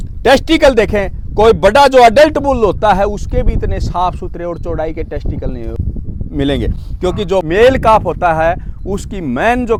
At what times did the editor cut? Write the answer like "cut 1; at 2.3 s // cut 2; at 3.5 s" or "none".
none